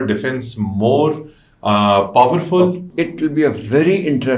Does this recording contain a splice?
yes; 1 cut; at 2.8 s

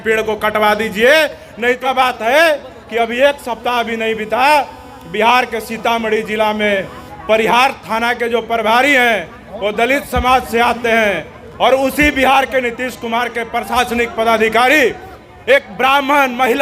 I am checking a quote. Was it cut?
yes; 1 cut; at 1.8 s

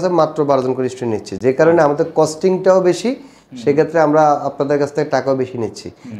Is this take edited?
no; 0 cuts

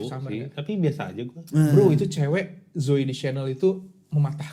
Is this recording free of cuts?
yes; 0 cuts

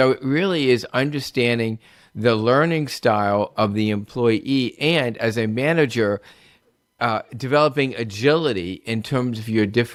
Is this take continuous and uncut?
yes; 0 cuts

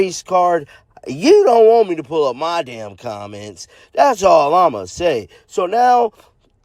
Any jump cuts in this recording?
no; 0 cuts

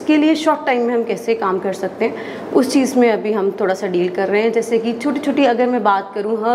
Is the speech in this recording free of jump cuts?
yes; 0 cuts

